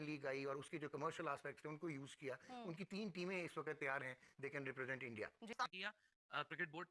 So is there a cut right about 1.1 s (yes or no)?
no